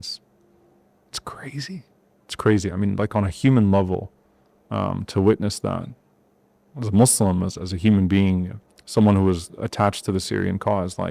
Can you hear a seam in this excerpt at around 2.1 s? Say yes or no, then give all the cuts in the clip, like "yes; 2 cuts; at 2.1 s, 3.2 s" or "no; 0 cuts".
no; 0 cuts